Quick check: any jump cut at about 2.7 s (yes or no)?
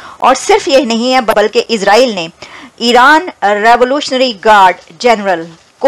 no